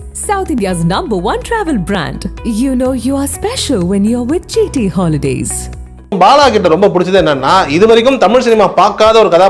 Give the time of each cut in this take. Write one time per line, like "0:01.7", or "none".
0:06.2